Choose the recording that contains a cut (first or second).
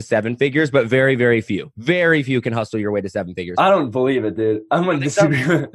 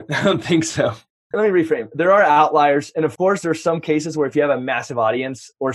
second